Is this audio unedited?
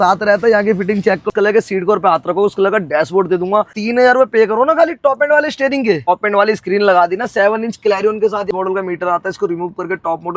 no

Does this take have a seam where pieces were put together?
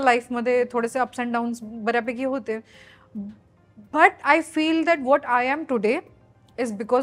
no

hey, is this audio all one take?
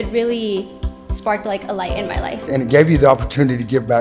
no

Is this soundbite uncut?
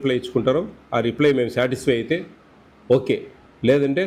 yes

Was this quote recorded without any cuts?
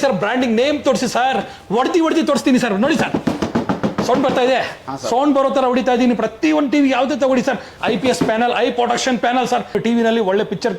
no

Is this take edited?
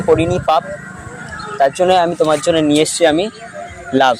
no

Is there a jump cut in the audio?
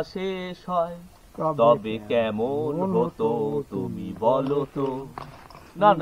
no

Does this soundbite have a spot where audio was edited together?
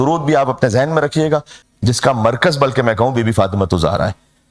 yes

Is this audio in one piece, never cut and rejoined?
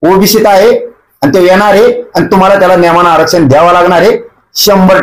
yes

